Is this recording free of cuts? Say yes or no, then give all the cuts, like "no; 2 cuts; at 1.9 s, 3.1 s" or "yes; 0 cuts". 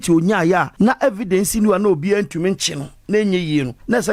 yes; 0 cuts